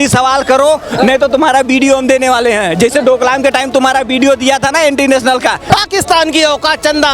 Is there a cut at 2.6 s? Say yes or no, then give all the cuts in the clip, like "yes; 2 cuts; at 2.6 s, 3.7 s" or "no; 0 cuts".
no; 1 cut; at 5.7 s